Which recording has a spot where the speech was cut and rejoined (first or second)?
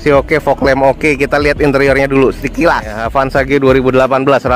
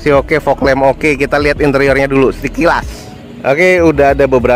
first